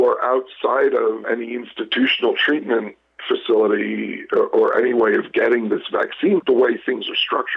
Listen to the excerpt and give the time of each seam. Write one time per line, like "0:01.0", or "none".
0:01.2
0:06.4